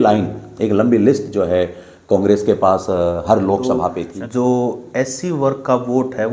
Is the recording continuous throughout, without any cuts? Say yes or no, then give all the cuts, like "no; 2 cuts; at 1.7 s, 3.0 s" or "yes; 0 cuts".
no; 1 cut; at 4.0 s